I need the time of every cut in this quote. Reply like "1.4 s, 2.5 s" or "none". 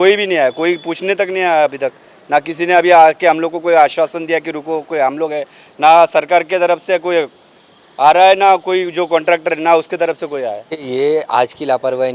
10.8 s